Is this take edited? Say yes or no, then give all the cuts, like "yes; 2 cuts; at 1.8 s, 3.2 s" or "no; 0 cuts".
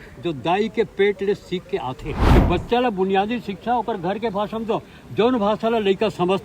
yes; 1 cut; at 2.1 s